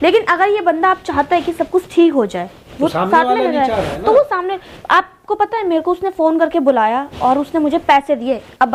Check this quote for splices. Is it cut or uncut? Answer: uncut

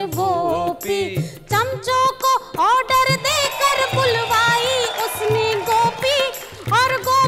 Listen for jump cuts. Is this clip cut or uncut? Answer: cut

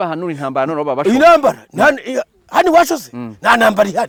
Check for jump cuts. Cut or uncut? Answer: uncut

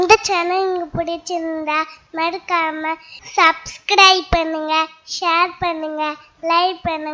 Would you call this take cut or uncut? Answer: uncut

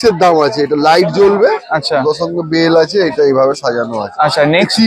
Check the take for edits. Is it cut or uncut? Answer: uncut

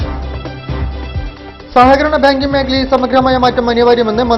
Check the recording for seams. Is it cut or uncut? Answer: cut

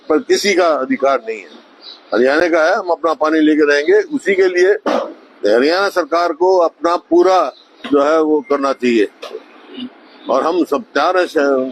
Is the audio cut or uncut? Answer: uncut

